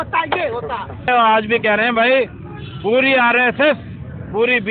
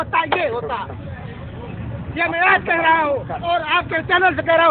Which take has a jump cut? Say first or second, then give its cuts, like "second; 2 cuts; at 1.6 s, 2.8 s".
first; 1 cut; at 1.1 s